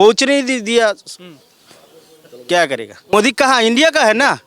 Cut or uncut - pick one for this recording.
cut